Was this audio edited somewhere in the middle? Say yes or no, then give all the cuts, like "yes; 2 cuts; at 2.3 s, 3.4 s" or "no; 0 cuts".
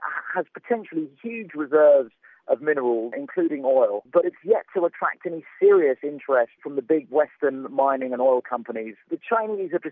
yes; 1 cut; at 8.9 s